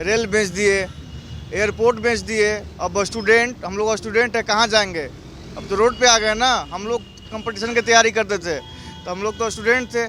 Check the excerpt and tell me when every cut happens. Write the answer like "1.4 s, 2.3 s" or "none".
none

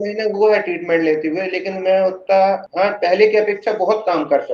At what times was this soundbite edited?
2.7 s

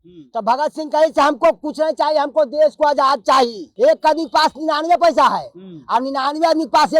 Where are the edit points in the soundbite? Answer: 3.7 s

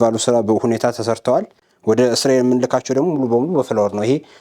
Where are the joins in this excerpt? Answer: 1.6 s

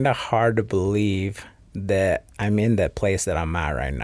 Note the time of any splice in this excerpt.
2.3 s

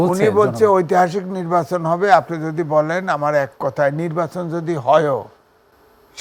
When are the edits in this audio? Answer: none

